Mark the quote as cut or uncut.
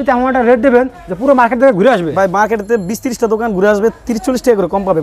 uncut